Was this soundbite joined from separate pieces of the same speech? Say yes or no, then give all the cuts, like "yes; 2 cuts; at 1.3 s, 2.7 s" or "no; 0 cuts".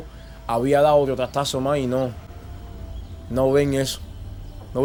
no; 0 cuts